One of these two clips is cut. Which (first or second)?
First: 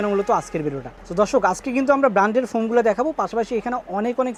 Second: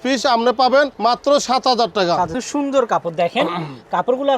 second